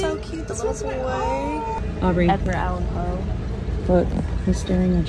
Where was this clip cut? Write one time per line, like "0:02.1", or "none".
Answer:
0:01.8